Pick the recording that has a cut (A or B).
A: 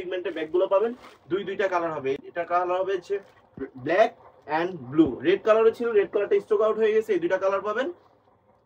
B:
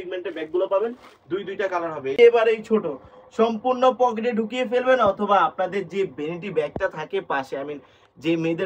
B